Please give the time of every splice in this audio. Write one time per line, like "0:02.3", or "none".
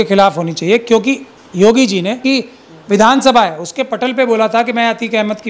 0:02.2

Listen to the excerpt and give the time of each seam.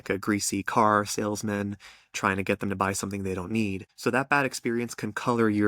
0:03.9

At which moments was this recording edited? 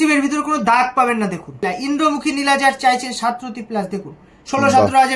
0:01.6

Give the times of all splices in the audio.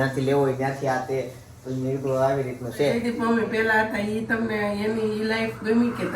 0:03.0

